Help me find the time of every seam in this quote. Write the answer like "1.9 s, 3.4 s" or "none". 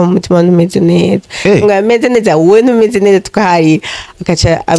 none